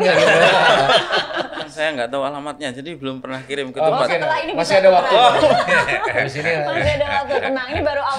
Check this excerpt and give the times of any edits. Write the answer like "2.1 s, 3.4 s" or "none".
1.7 s